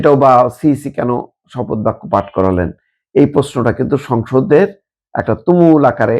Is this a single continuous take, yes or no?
yes